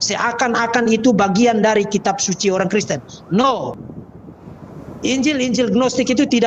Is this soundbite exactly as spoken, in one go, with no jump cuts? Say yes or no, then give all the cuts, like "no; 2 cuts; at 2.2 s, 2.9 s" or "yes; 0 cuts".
no; 1 cut; at 3.8 s